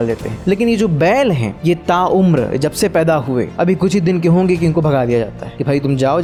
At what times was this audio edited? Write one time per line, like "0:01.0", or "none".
none